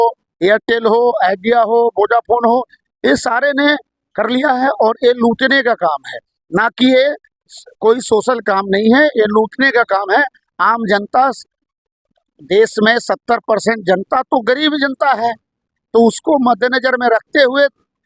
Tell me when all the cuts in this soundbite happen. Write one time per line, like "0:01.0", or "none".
none